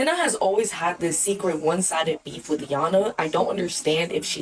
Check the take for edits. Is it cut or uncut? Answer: uncut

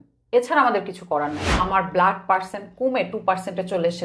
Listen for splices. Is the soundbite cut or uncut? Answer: cut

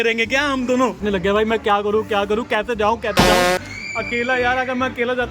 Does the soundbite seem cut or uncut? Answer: cut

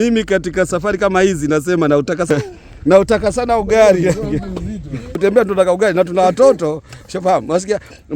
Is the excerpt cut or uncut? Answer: cut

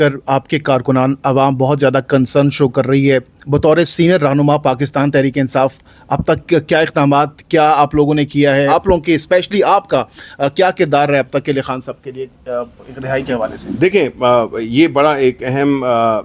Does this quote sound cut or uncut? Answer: uncut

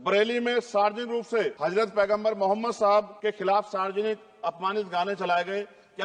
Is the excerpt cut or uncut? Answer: cut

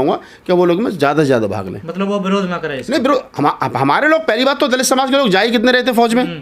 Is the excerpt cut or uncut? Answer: uncut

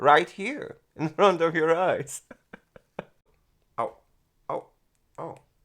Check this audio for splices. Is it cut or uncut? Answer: cut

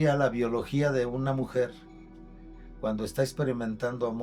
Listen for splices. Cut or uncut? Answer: uncut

